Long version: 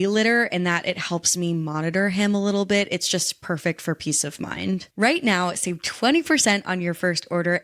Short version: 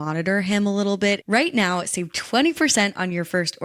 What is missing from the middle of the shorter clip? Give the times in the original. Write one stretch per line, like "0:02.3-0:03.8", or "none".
0:02.9-0:04.9